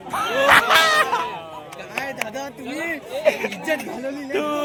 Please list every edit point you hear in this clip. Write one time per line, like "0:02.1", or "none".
none